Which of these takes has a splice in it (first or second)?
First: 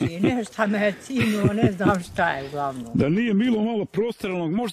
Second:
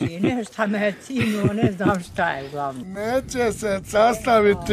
second